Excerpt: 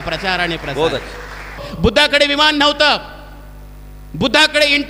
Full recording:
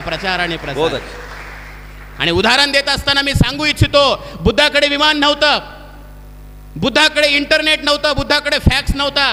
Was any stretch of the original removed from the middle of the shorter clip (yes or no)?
yes